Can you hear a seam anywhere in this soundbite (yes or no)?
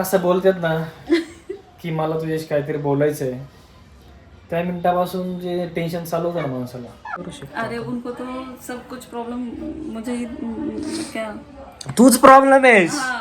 yes